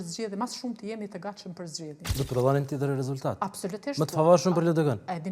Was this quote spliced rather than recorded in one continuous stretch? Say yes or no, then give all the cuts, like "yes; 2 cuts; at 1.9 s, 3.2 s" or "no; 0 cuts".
yes; 1 cut; at 2.0 s